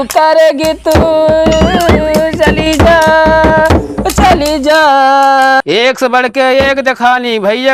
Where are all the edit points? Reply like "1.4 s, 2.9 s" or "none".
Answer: 5.6 s